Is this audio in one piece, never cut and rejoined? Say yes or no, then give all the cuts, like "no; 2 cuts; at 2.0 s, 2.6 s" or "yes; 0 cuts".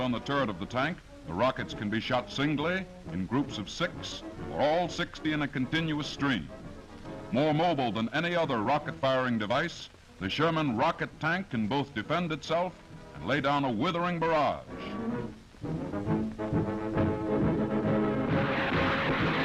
yes; 0 cuts